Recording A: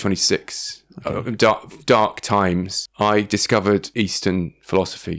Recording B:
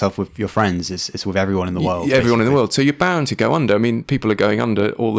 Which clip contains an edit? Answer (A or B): A